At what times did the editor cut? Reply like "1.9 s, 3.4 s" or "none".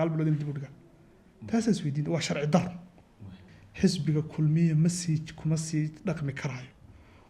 3.4 s